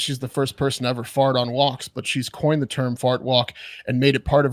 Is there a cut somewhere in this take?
no; 0 cuts

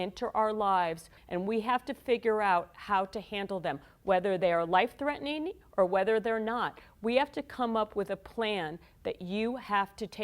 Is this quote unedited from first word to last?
no; 1 cut; at 1.1 s

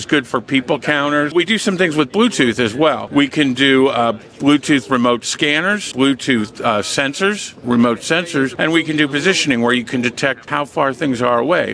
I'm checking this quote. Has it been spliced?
yes; 5 cuts; at 1.3 s, 3.0 s, 5.9 s, 8.5 s, 10.4 s

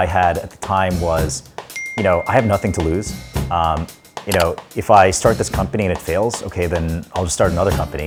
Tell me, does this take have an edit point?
no; 0 cuts

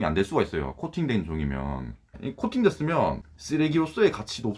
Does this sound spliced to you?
yes; 2 cuts; at 2.2 s, 3.3 s

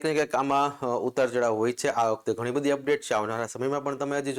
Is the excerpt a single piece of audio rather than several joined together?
yes; 0 cuts

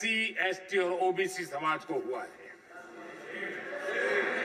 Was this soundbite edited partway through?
no; 0 cuts

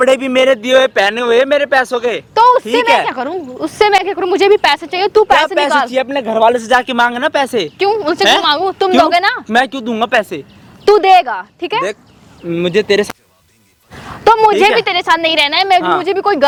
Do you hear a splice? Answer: no; 0 cuts

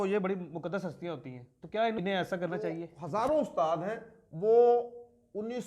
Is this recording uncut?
no; 2 cuts; at 2.0 s, 2.9 s

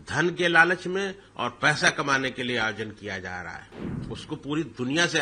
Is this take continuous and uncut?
no; 1 cut; at 3.7 s

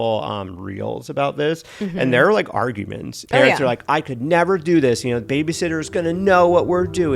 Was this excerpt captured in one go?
no; 2 cuts; at 3.1 s, 3.8 s

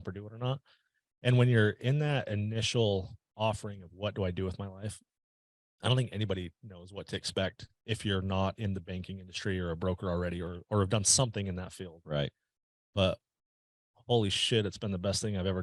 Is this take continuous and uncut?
yes; 0 cuts

